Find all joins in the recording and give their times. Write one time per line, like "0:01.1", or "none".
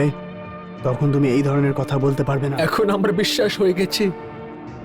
0:02.5